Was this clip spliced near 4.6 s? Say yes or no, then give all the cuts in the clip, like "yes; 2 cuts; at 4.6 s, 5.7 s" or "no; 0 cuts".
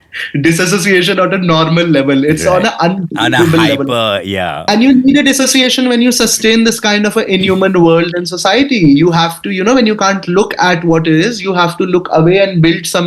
yes; 1 cut; at 4.6 s